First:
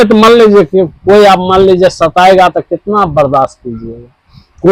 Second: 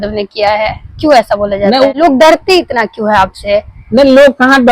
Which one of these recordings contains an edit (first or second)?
second